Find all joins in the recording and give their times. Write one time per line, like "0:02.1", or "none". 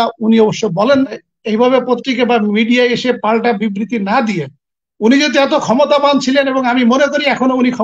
0:01.1